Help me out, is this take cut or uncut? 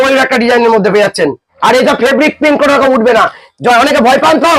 cut